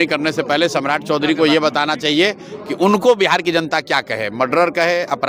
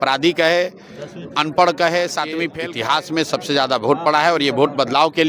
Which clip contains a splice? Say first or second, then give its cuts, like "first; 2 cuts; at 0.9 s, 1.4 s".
second; 1 cut; at 2.5 s